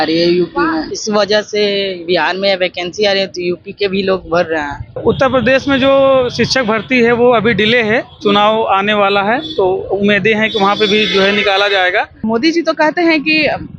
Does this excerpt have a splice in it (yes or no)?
yes